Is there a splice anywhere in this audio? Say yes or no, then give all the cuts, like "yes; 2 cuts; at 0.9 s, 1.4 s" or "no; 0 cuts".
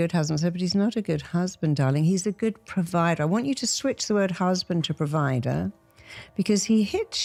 no; 0 cuts